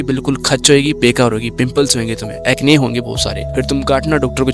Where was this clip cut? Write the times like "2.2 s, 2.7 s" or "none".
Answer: 3.4 s